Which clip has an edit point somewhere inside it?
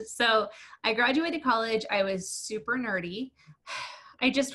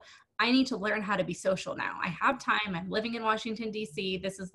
first; 1 cut; at 3.5 s

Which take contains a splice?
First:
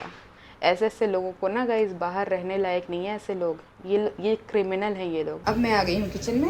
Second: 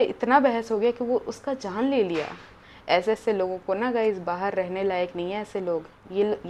first; 1 cut; at 5.3 s

